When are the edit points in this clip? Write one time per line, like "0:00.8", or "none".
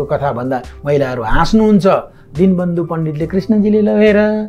none